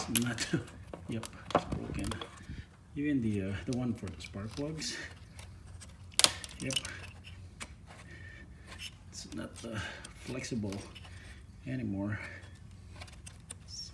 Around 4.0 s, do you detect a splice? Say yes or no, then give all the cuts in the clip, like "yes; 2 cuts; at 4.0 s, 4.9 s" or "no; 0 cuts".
no; 0 cuts